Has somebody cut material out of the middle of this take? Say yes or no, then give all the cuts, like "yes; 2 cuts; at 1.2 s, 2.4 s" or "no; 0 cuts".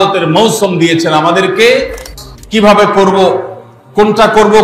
yes; 1 cut; at 2.0 s